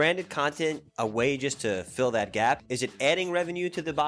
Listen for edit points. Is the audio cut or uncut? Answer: cut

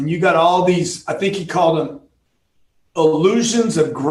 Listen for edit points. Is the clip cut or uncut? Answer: uncut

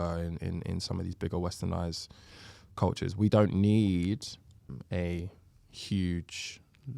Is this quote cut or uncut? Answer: cut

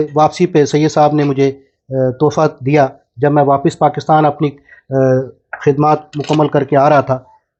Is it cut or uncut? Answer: uncut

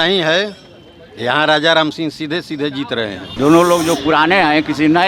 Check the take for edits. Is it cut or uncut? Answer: cut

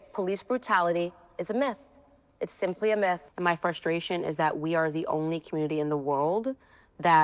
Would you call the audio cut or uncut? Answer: cut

